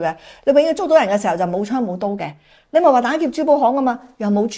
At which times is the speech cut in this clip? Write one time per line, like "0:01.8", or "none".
none